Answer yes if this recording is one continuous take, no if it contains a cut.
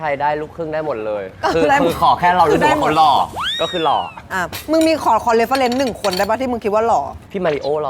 yes